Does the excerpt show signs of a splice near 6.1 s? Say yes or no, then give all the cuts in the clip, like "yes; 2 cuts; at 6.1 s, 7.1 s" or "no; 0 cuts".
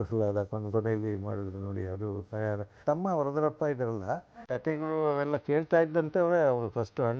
no; 2 cuts; at 2.8 s, 4.5 s